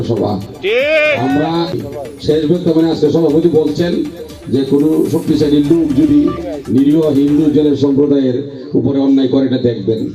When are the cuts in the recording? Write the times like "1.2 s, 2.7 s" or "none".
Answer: 1.8 s